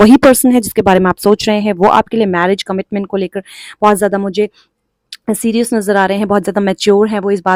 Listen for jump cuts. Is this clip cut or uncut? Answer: uncut